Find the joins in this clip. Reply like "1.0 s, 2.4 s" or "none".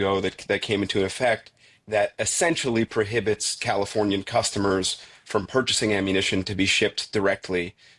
none